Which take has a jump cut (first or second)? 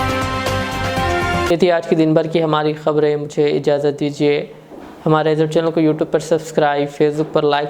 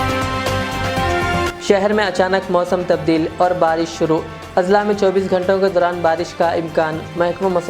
second